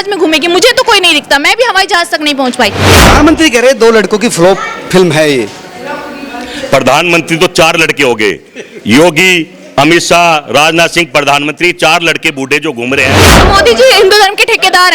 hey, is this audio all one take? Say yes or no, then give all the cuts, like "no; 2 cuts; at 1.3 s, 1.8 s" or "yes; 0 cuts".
no; 2 cuts; at 2.8 s, 13.4 s